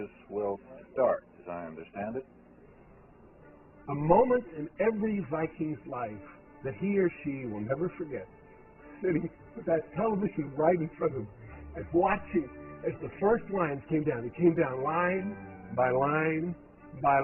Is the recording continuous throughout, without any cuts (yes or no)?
no